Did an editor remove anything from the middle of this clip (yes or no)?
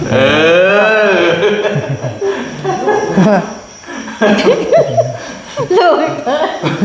no